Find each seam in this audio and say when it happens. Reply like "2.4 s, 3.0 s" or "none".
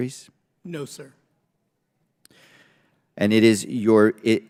none